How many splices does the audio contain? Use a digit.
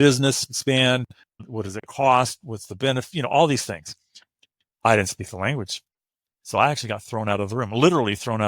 1